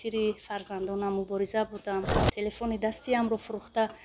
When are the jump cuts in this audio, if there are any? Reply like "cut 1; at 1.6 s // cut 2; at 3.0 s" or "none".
cut 1; at 2.2 s